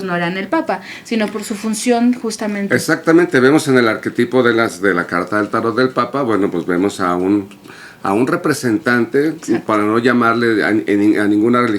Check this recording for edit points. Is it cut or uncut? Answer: uncut